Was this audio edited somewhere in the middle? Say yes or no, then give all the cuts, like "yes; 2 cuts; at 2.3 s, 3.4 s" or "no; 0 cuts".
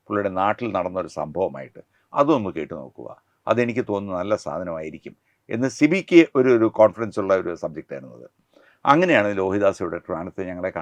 no; 0 cuts